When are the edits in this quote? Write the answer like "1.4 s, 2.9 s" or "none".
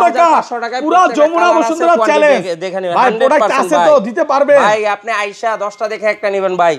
none